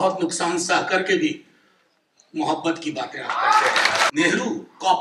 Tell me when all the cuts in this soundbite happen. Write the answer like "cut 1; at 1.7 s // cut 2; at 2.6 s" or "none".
cut 1; at 4.1 s